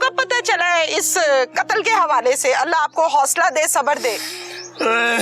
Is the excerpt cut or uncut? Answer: uncut